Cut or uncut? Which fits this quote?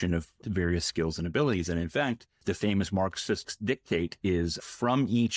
cut